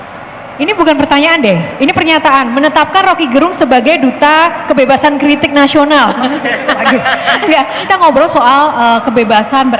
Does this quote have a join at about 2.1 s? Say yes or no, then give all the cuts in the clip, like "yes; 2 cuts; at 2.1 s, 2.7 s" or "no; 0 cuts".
no; 1 cut; at 7.8 s